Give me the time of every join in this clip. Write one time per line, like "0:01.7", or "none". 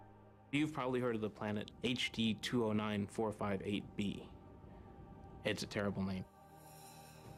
none